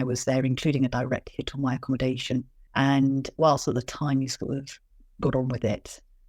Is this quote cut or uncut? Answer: cut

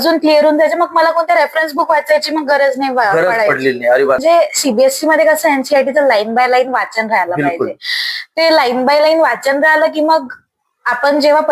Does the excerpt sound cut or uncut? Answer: cut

